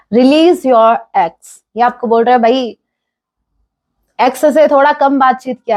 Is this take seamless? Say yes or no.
yes